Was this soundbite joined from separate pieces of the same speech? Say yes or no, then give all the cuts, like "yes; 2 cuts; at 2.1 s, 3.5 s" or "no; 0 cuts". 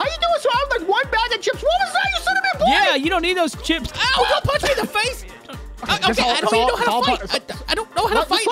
no; 0 cuts